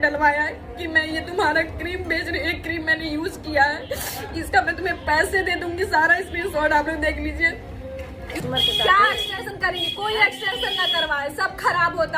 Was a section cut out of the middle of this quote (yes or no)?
yes